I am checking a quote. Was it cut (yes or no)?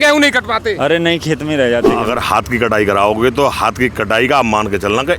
yes